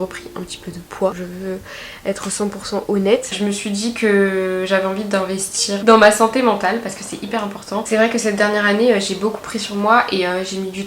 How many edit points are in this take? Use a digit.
4